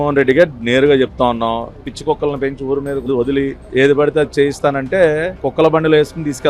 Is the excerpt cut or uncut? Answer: cut